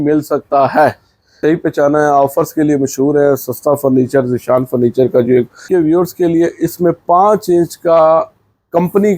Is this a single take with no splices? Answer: no; 2 cuts; at 1.4 s, 5.6 s

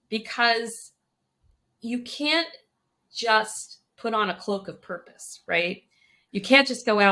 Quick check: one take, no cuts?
yes; 0 cuts

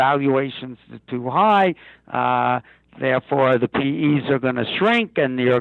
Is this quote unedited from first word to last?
yes; 0 cuts

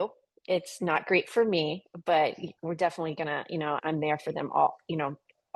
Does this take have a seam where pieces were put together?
yes; 1 cut; at 3.8 s

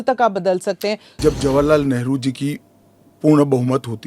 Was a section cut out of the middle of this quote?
yes; 1 cut; at 1.1 s

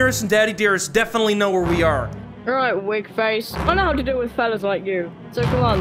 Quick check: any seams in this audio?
yes; 1 cut; at 2.2 s

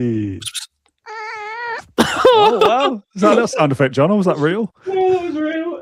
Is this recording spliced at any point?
no; 0 cuts

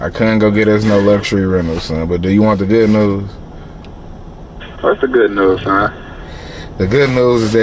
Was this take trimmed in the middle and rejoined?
no; 0 cuts

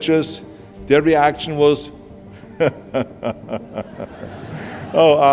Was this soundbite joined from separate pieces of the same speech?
no; 0 cuts

